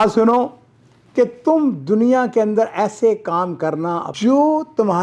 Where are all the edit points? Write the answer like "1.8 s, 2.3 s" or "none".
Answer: 4.1 s